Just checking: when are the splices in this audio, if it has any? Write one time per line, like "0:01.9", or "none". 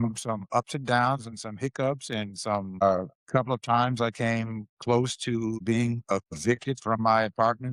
none